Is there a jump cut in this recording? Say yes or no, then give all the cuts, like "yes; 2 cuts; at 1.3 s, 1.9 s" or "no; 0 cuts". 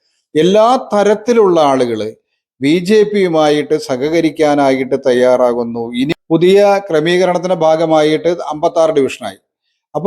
yes; 1 cut; at 6.2 s